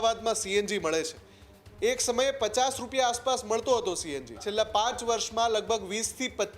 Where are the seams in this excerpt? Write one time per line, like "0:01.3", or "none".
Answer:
0:04.4